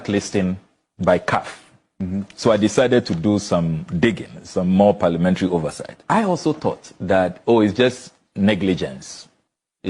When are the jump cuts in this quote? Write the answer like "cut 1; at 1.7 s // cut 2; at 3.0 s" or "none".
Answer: cut 1; at 6.1 s